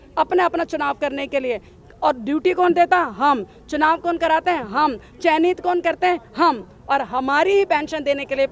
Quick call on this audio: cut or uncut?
uncut